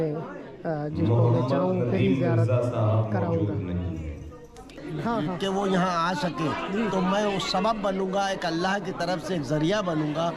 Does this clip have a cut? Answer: yes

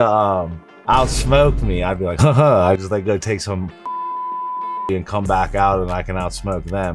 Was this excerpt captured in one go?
yes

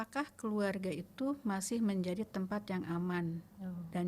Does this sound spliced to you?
no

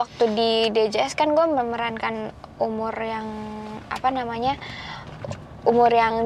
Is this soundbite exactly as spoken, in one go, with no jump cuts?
yes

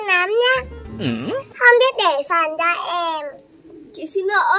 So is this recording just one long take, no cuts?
yes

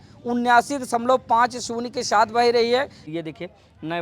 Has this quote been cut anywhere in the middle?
yes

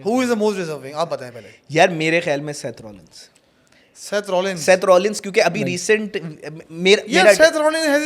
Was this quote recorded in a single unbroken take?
yes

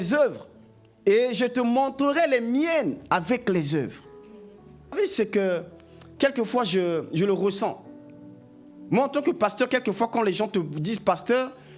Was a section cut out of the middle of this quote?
yes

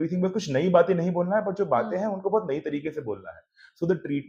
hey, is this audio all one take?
yes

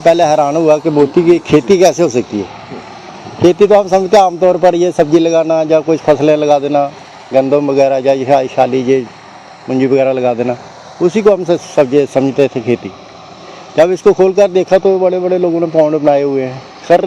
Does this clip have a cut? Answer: no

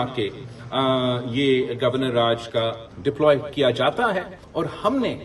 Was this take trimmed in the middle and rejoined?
yes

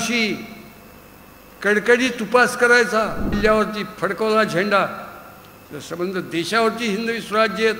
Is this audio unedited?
no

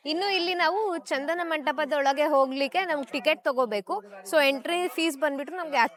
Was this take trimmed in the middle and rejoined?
no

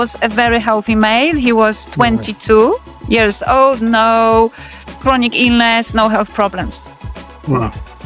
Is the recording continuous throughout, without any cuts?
yes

